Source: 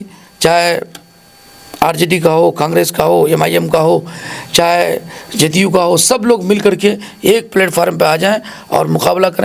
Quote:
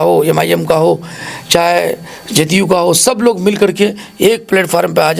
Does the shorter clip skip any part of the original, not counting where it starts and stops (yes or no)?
no